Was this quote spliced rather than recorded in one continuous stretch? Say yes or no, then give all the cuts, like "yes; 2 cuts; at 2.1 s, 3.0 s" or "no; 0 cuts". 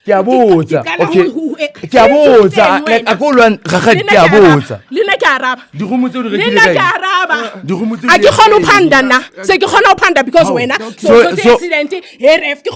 no; 0 cuts